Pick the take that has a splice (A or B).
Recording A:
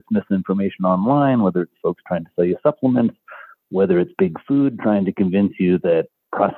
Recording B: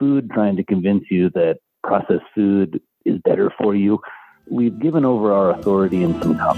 B